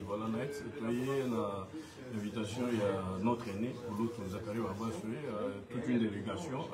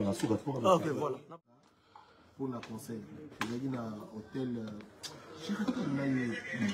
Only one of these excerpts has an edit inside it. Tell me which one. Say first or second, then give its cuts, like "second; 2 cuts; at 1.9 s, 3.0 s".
second; 1 cut; at 1.3 s